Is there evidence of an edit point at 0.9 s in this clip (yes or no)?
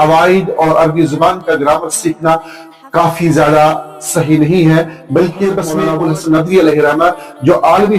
no